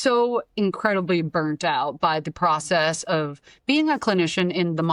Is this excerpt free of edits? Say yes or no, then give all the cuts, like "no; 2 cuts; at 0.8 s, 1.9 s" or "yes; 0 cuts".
yes; 0 cuts